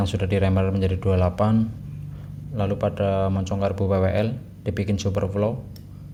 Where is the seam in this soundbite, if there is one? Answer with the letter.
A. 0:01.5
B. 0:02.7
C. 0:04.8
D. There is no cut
D